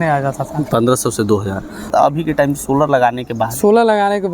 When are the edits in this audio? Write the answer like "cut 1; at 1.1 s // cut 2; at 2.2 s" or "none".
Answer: cut 1; at 1.9 s

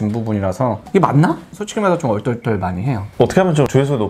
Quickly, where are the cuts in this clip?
cut 1; at 3.0 s

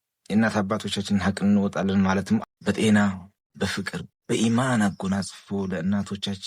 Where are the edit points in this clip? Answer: cut 1; at 2.5 s

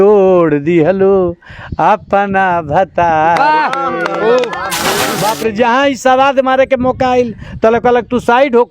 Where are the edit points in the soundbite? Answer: cut 1; at 5.0 s

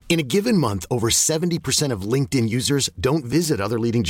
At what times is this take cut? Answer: none

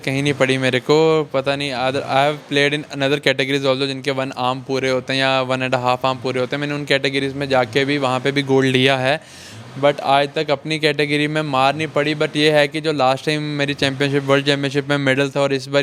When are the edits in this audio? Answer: none

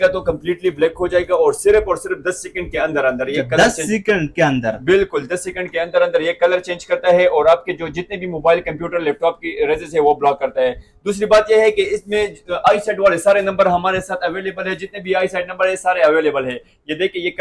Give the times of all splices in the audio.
none

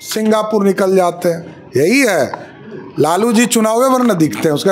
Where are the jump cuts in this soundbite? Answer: none

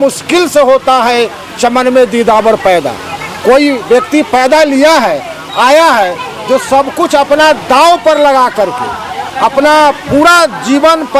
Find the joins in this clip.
none

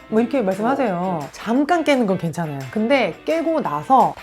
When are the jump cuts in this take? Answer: cut 1; at 2.6 s

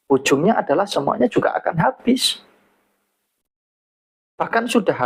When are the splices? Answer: none

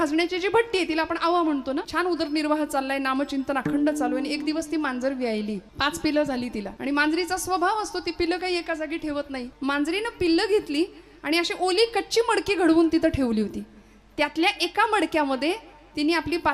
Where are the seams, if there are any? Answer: cut 1; at 1.9 s // cut 2; at 5.7 s // cut 3; at 6.7 s // cut 4; at 9.4 s

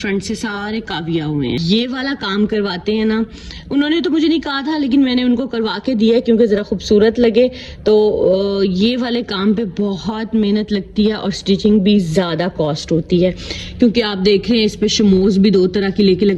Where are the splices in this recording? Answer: cut 1; at 1.6 s

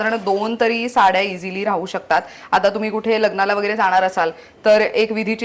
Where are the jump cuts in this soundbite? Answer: none

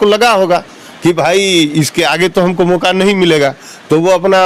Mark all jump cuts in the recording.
none

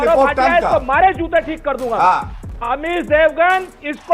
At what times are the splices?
cut 1; at 2.7 s

